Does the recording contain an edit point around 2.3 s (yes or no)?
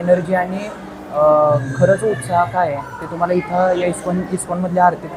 no